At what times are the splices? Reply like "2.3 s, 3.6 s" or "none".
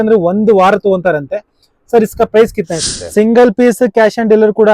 2.9 s